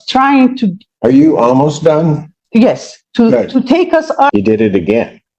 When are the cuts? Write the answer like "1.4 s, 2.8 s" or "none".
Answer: 4.3 s